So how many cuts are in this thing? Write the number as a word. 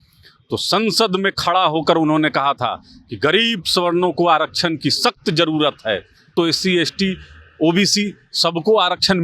one